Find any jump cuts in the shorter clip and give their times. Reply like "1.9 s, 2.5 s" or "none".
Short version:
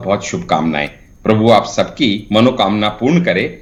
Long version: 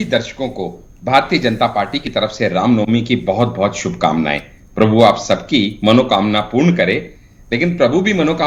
none